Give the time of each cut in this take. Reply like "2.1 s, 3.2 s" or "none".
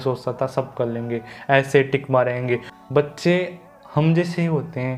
2.7 s